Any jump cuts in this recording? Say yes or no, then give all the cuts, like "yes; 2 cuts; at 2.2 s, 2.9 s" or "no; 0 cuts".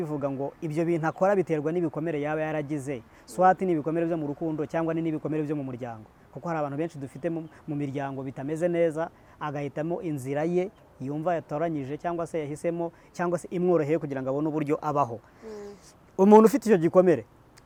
no; 0 cuts